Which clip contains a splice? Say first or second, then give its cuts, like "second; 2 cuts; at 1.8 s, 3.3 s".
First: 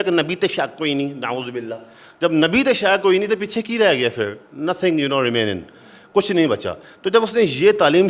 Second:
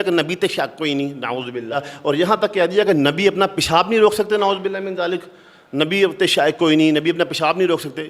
second; 1 cut; at 1.9 s